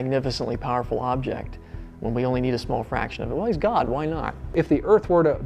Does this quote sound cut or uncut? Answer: cut